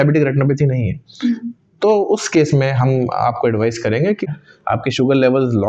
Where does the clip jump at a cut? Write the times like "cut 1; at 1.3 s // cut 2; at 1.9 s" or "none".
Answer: cut 1; at 4.2 s

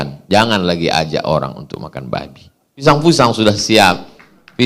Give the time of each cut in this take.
cut 1; at 2.8 s

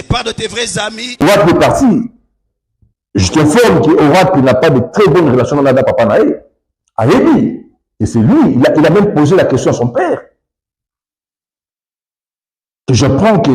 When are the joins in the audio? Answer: cut 1; at 1.2 s

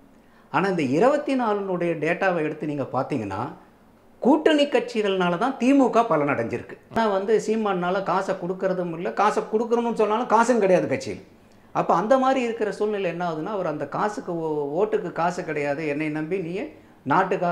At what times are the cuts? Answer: cut 1; at 7.0 s

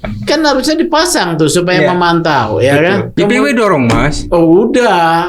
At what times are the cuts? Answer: cut 1; at 3.1 s

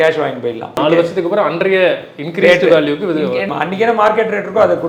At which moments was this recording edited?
cut 1; at 0.8 s // cut 2; at 3.5 s

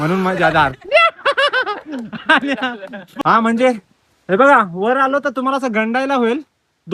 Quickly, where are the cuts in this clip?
cut 1; at 3.1 s

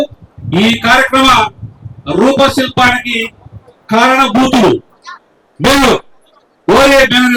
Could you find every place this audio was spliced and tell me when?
none

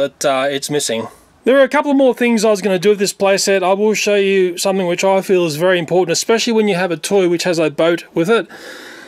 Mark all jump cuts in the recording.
none

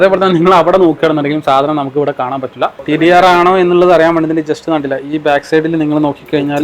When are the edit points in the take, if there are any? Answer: cut 1; at 2.8 s

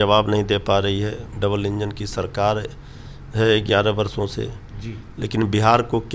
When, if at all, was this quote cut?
cut 1; at 1.2 s

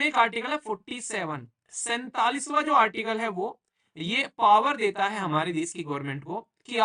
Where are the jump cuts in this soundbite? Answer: none

